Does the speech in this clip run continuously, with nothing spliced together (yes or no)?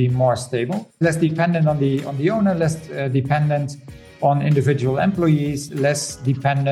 no